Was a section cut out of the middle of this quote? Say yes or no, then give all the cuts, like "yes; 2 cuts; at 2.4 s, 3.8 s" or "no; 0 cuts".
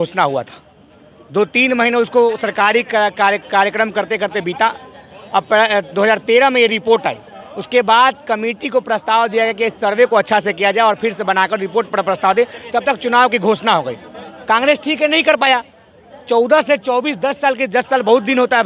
no; 0 cuts